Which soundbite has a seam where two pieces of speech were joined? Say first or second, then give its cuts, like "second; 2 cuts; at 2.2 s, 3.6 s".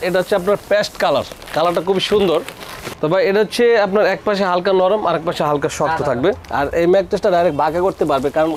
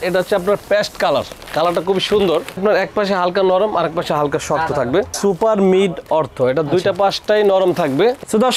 second; 2 cuts; at 2.6 s, 5.2 s